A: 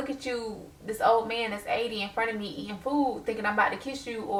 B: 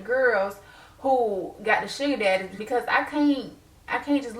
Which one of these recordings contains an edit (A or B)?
B